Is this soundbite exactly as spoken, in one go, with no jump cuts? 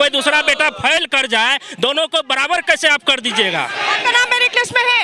yes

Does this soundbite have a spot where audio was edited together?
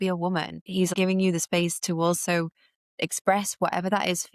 yes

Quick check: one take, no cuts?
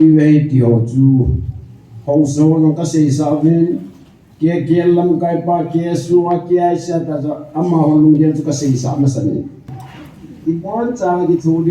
no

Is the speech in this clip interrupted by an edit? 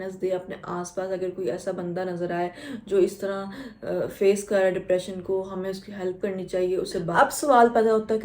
yes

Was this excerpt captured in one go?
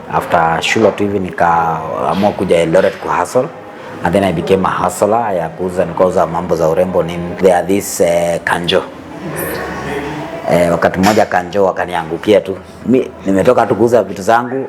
no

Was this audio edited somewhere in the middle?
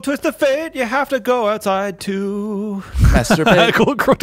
no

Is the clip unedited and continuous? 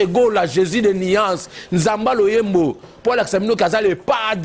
yes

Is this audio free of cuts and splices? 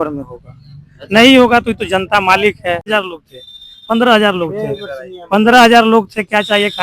no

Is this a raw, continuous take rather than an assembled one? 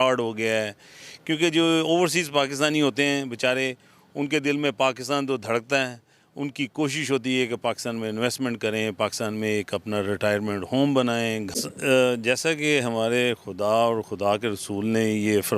no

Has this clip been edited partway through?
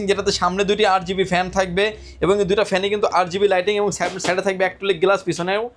no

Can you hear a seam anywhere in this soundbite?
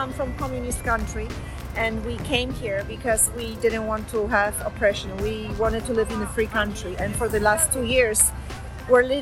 no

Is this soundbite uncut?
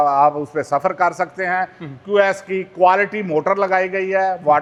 yes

